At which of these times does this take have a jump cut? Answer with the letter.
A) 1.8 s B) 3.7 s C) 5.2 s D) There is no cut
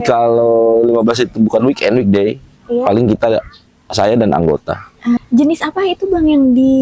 C